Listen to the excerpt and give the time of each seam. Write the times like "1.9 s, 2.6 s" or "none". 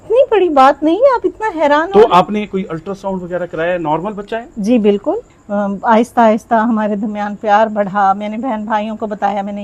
5.3 s